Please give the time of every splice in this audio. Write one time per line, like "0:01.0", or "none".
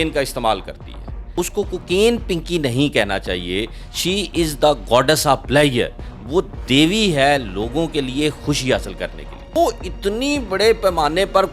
0:01.2
0:09.5